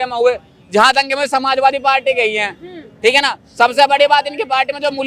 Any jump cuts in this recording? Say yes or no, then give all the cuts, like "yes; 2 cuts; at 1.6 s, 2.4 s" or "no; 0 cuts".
no; 0 cuts